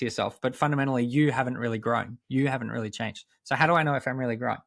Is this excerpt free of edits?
yes; 0 cuts

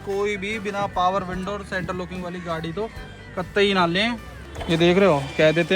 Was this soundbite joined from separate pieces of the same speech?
yes; 1 cut; at 4.2 s

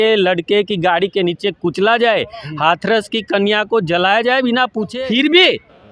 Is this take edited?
yes; 1 cut; at 4.8 s

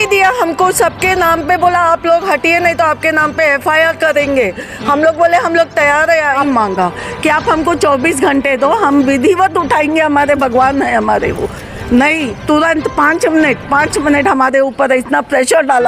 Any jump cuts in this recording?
yes; 1 cut; at 6.4 s

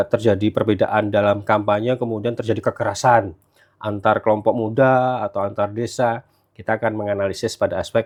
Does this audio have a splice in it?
no; 0 cuts

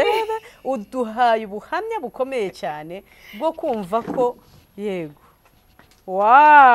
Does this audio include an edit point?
no; 0 cuts

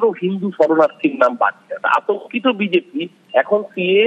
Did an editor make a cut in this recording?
yes; 1 cut; at 1.8 s

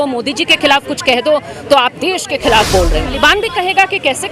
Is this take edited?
yes; 1 cut; at 3.1 s

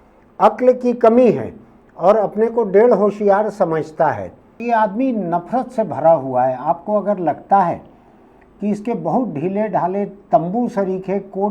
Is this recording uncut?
no; 1 cut; at 4.6 s

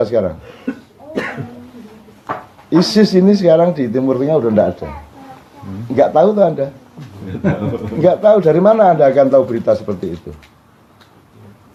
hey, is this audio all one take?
yes; 0 cuts

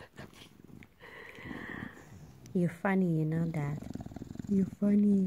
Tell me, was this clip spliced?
yes; 1 cut; at 2.0 s

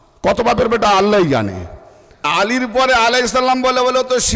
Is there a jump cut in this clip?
yes; 1 cut; at 2.3 s

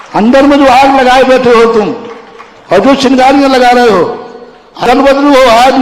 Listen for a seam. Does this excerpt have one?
yes; 1 cut; at 4.8 s

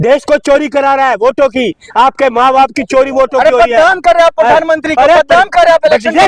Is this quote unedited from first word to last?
yes; 0 cuts

